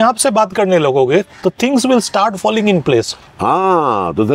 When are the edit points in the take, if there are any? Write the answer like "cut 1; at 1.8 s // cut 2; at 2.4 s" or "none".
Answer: cut 1; at 3.2 s